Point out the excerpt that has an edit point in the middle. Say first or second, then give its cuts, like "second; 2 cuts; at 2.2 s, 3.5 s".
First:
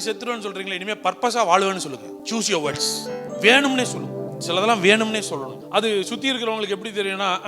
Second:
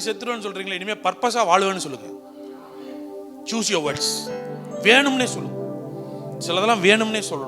first; 4 cuts; at 2.2 s, 3.3 s, 4.3 s, 5.6 s